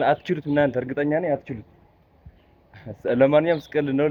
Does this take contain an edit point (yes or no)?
no